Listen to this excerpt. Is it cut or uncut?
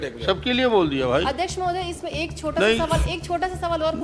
uncut